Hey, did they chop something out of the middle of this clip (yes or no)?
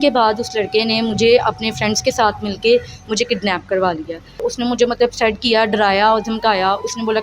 yes